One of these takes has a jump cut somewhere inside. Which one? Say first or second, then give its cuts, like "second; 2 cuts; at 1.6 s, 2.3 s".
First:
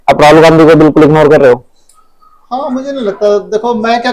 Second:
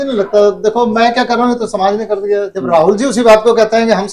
second; 1 cut; at 2.5 s